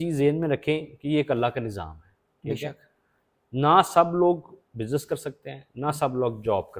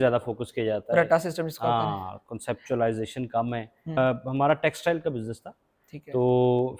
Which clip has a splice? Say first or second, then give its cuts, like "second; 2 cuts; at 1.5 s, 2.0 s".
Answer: second; 1 cut; at 4.0 s